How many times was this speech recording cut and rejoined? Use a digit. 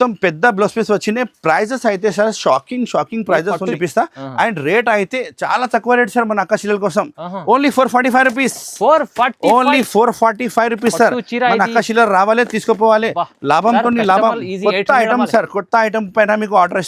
1